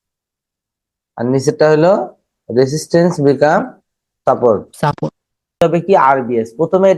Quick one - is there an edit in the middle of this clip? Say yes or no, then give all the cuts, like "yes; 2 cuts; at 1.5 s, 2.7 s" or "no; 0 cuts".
yes; 1 cut; at 5.6 s